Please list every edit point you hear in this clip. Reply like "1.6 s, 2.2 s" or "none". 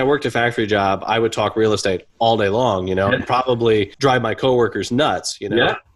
none